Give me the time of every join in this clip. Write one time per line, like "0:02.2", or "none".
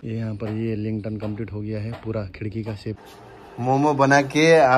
0:03.0

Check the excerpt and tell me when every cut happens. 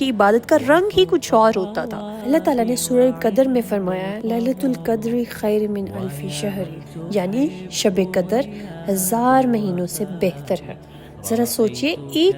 none

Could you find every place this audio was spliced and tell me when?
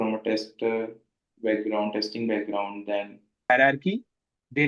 0:03.5

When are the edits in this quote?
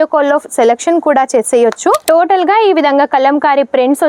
0:02.0

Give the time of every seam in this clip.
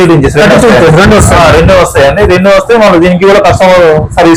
none

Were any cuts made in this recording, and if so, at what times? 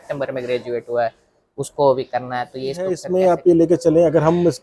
0:03.1

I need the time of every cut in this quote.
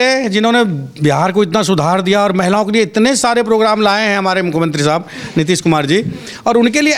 none

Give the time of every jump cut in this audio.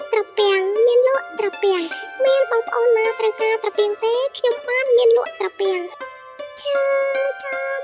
0:06.0

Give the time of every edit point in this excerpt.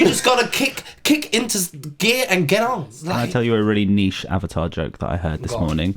0:02.9

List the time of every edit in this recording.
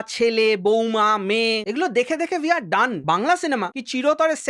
0:03.0

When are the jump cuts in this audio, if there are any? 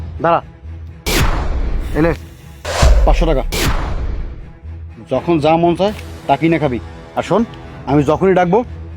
0:00.9
0:01.6

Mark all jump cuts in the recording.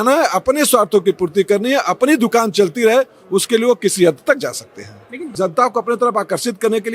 0:05.3

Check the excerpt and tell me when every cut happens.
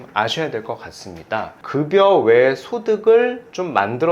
0:01.5

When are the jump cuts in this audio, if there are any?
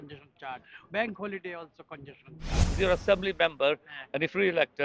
0:02.7

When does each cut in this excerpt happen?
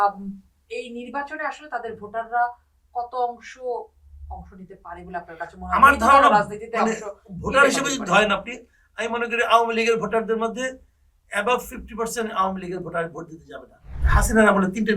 0:13.9

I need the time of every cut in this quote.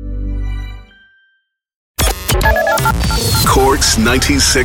0:02.0

